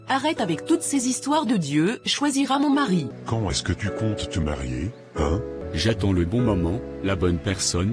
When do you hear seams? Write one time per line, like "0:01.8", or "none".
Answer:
0:03.2
0:05.6